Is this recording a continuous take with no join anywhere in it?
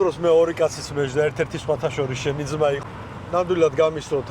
no; 1 cut; at 2.8 s

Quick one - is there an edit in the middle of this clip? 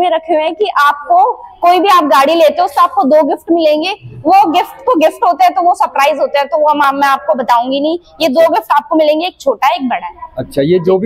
no; 0 cuts

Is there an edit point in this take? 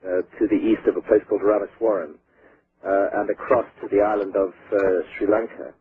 no; 0 cuts

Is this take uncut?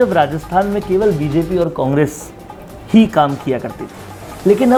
yes; 0 cuts

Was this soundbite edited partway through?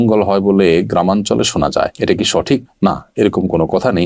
no; 0 cuts

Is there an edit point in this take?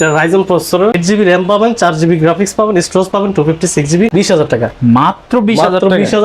yes; 2 cuts; at 0.9 s, 4.1 s

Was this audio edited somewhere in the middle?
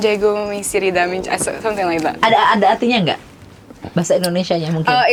no; 0 cuts

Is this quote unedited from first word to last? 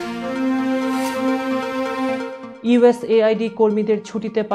yes; 0 cuts

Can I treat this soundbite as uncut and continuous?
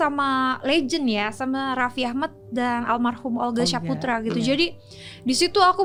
yes; 0 cuts

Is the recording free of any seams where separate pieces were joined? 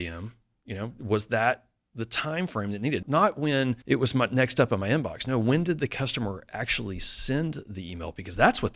no; 2 cuts; at 3.0 s, 3.8 s

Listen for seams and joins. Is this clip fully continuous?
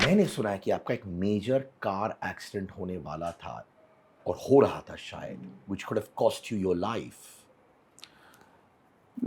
yes; 0 cuts

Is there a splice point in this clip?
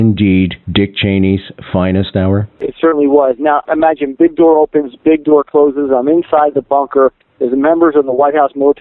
yes; 1 cut; at 3.6 s

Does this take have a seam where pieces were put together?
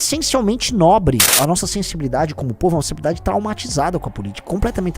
yes; 1 cut; at 1.4 s

